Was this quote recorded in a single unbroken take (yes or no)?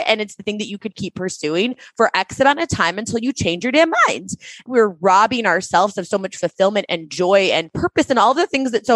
no